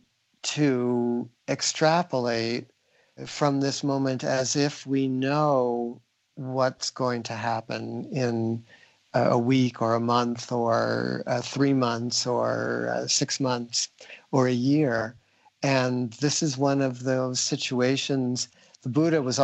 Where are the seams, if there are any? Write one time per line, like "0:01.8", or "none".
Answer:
0:03.3